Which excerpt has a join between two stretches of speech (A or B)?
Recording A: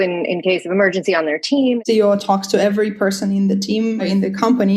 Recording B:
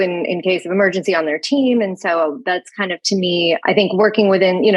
A